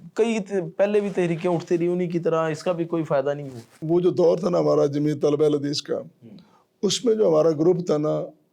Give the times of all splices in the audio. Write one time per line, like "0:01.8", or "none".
0:03.8

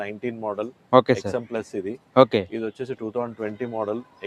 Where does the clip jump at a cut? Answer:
none

